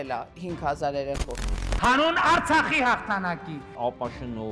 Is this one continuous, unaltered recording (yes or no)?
yes